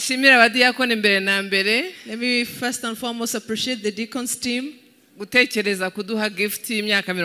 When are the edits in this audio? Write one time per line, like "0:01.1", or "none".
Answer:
none